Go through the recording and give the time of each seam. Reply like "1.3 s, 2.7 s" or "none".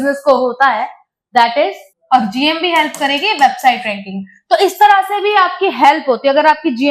1.9 s